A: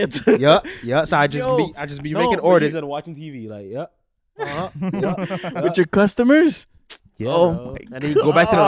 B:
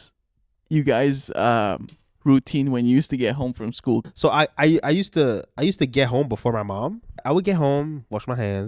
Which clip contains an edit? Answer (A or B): B